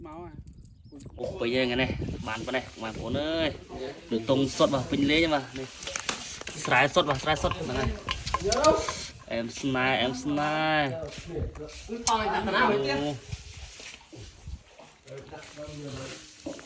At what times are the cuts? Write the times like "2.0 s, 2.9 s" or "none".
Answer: 1.1 s